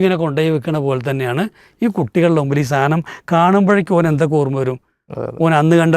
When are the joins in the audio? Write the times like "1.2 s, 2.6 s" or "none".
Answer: none

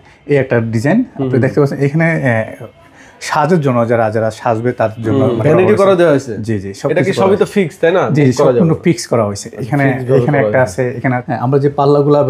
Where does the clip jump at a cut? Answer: 5.4 s, 11.1 s

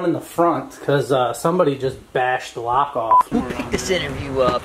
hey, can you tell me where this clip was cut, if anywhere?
3.3 s

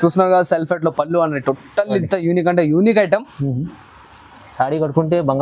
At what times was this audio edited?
none

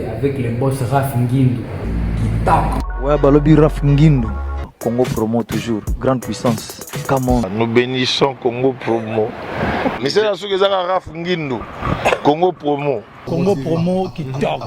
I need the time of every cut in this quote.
1.8 s, 2.8 s

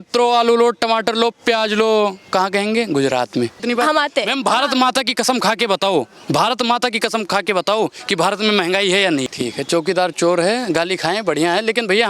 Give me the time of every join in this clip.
3.6 s, 9.3 s

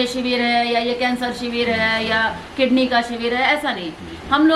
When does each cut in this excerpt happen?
none

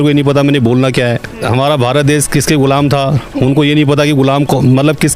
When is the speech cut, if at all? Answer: 1.5 s

